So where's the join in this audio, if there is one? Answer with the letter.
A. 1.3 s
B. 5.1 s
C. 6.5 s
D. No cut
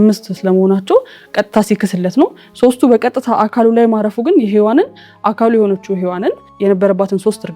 C